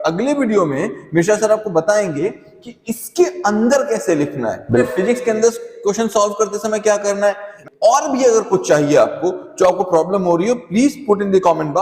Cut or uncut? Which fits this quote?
cut